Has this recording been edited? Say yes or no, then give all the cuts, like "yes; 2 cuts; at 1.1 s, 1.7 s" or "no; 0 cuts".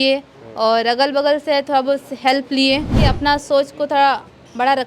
yes; 1 cut; at 3.0 s